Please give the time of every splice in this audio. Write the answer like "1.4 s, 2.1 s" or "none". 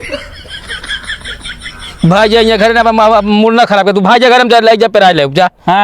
1.2 s

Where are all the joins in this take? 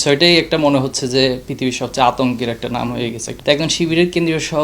3.3 s

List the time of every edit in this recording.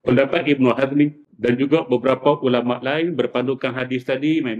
1.3 s

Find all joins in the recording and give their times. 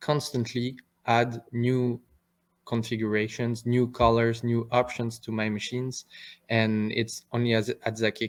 none

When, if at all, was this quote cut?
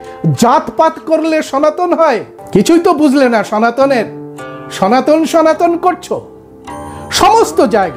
2.3 s

